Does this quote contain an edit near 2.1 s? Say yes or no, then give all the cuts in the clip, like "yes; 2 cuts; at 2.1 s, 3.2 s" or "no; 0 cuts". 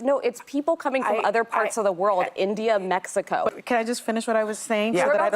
no; 1 cut; at 3.5 s